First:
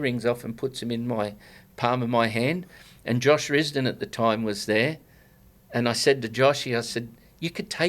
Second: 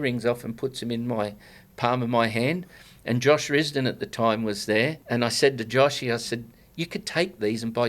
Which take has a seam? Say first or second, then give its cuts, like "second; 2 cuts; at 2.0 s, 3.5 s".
second; 1 cut; at 5.0 s